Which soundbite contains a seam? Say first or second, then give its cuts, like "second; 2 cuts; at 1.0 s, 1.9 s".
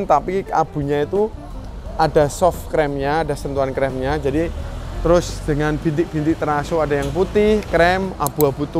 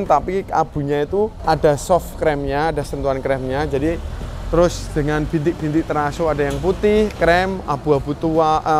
second; 1 cut; at 1.4 s